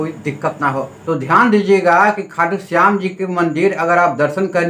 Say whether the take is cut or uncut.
cut